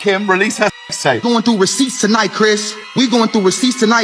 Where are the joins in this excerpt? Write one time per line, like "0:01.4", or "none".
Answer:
0:01.2